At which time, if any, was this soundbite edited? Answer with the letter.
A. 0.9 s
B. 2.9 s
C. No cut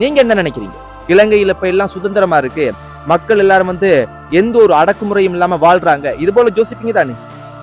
A